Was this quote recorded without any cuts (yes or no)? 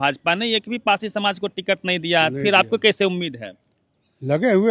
yes